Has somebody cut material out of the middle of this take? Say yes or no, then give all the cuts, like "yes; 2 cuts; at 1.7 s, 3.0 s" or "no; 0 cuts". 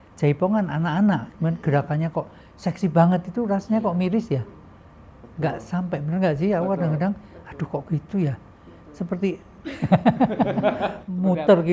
no; 0 cuts